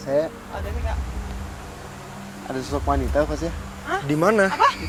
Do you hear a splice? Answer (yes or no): no